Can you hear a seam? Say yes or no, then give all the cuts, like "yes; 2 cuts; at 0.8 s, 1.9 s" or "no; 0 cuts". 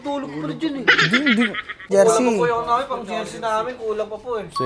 yes; 1 cut; at 1.8 s